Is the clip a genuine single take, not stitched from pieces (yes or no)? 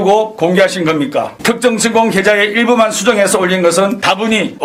yes